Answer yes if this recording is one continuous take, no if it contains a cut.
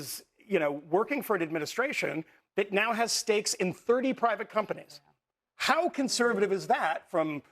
no